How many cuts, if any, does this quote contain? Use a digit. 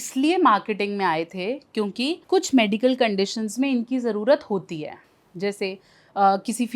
1